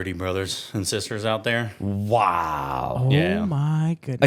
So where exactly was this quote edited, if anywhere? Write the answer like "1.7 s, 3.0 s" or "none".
none